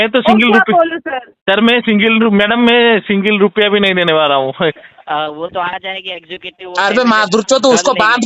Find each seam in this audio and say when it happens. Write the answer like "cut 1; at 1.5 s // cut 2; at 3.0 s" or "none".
cut 1; at 4.9 s